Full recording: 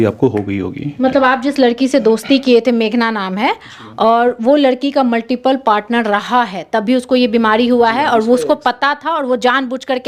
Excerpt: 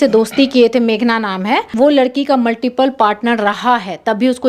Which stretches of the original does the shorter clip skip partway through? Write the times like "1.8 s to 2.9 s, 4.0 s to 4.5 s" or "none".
3.6 s to 4.4 s